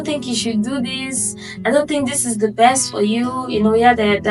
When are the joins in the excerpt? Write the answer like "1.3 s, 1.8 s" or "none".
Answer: none